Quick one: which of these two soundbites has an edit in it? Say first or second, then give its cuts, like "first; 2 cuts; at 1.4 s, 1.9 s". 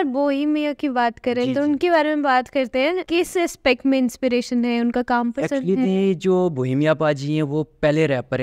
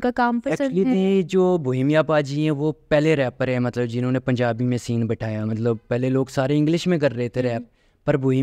first; 1 cut; at 3.0 s